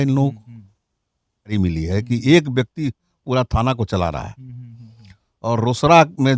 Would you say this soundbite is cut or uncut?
cut